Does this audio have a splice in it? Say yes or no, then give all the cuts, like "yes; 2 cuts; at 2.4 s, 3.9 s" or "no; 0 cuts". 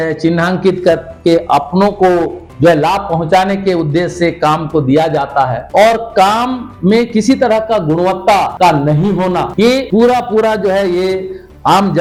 no; 0 cuts